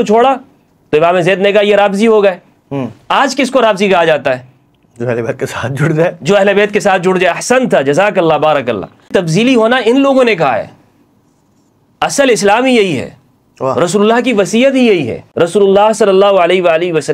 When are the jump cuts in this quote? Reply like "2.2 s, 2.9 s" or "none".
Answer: 9.1 s, 15.2 s